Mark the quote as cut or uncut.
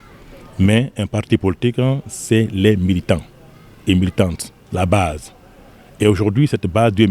uncut